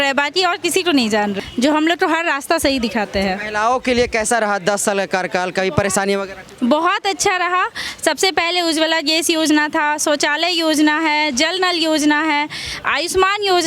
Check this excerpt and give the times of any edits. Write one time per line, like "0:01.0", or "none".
0:01.4